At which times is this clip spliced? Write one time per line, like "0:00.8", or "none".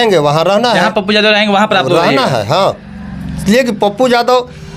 none